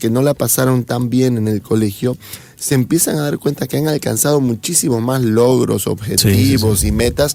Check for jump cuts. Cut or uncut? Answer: uncut